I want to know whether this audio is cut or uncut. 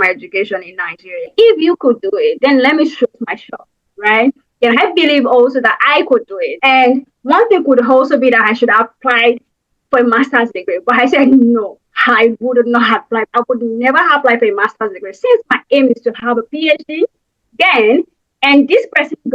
cut